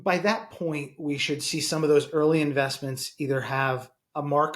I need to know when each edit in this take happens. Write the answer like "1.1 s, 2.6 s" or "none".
none